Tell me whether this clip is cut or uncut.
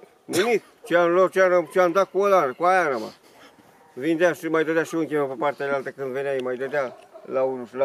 uncut